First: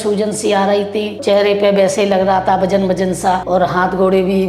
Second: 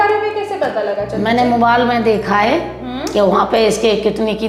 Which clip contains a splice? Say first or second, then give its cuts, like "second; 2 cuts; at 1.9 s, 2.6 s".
first; 2 cuts; at 1.2 s, 3.4 s